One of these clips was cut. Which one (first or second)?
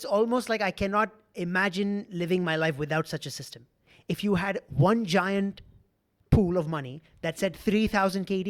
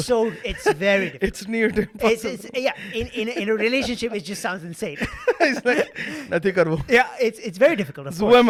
first